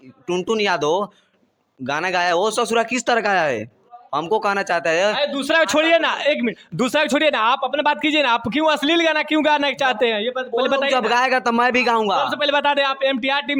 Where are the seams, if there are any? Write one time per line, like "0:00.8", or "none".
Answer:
none